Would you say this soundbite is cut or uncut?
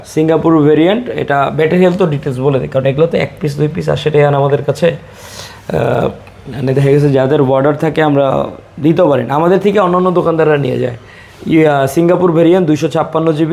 uncut